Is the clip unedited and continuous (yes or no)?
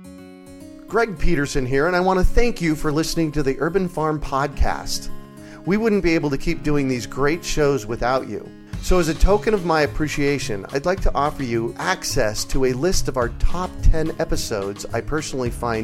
no